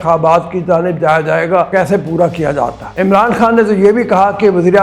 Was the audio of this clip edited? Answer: yes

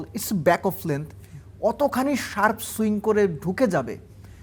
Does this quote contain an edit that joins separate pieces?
no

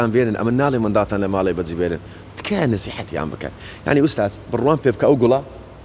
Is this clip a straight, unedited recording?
yes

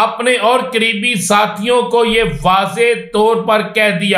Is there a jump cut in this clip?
no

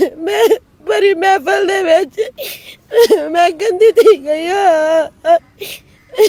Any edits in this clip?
no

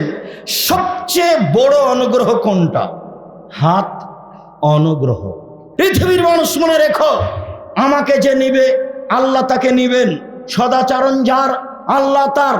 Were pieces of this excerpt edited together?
yes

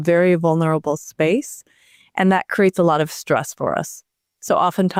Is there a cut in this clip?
no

